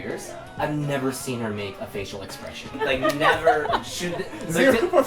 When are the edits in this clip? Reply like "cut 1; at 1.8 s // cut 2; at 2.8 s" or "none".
cut 1; at 2.7 s

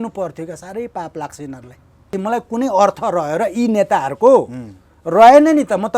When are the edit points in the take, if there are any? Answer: cut 1; at 2.1 s

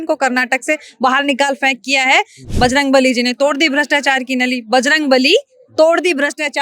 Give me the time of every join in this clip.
cut 1; at 2.4 s

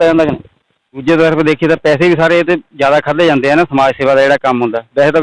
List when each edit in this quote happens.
cut 1; at 1.0 s

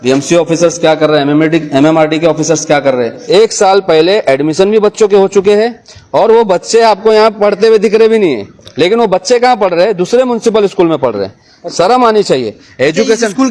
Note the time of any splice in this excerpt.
cut 1; at 3.2 s

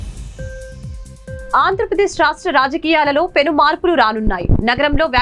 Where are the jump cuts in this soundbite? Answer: cut 1; at 0.9 s

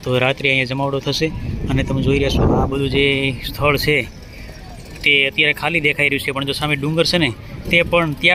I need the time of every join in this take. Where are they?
none

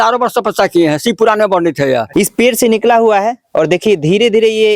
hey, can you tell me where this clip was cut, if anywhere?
cut 1; at 2.1 s

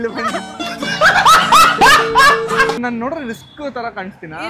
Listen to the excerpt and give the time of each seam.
cut 1; at 2.8 s

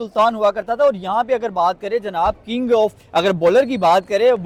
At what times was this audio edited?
none

